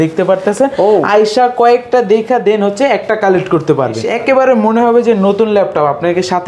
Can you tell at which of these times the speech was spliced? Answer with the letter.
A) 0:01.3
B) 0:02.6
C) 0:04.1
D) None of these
C